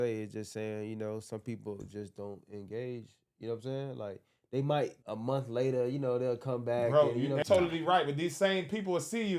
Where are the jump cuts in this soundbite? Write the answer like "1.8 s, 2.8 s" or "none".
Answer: 5.0 s, 7.4 s